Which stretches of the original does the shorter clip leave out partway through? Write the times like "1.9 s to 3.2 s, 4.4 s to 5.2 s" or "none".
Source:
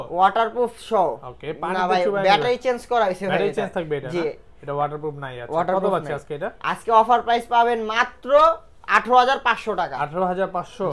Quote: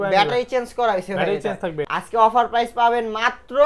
4.0 s to 6.6 s